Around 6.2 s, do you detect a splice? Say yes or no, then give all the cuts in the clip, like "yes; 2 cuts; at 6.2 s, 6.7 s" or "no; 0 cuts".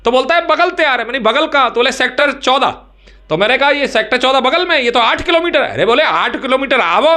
no; 1 cut; at 2.2 s